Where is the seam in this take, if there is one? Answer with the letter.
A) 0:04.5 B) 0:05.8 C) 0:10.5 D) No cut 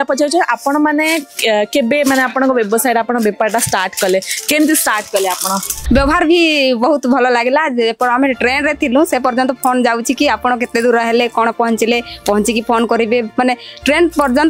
B